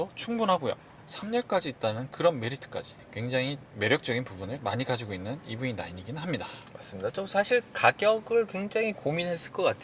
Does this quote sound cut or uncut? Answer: uncut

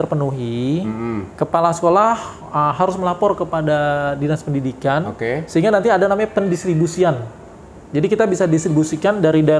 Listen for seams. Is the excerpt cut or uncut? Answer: uncut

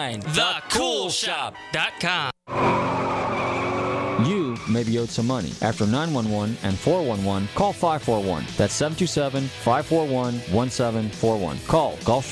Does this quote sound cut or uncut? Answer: cut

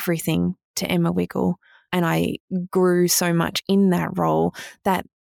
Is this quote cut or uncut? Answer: cut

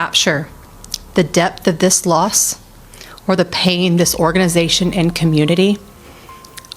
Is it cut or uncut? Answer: uncut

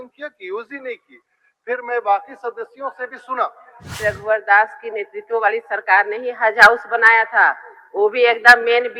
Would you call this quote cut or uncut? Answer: cut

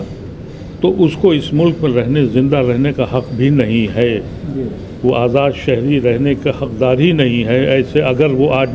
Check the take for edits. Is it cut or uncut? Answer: uncut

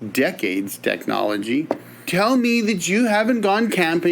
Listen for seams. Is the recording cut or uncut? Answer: cut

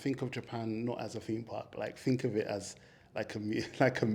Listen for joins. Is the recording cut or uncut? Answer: uncut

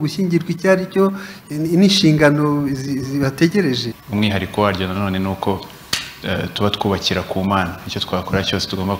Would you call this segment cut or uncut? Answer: cut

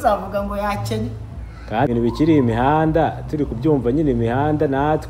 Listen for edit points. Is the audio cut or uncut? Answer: cut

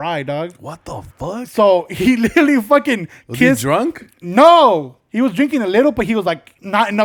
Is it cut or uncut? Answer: uncut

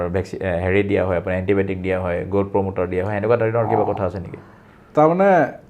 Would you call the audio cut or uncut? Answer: uncut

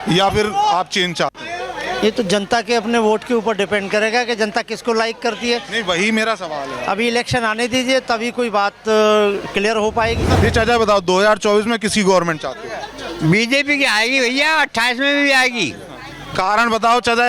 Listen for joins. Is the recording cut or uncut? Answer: cut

